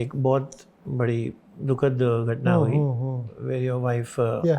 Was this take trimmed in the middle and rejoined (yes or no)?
yes